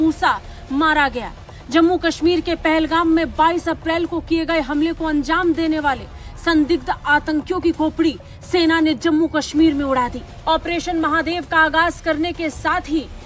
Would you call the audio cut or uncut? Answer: uncut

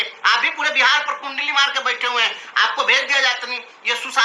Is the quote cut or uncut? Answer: uncut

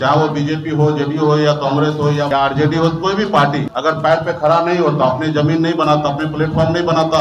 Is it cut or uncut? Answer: cut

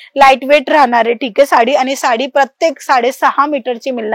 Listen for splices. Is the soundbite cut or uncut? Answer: uncut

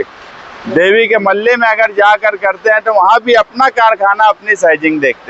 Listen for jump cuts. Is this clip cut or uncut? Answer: uncut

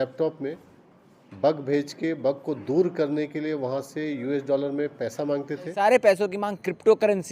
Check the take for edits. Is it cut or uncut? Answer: cut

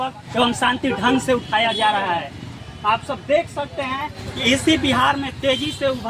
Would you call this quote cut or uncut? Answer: cut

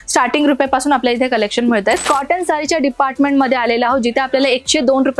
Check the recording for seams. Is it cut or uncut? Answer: cut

